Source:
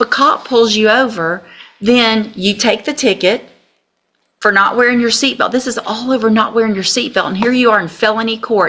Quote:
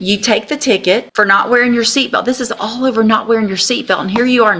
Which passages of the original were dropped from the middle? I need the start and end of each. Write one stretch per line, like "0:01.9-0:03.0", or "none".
0:03.5-0:04.4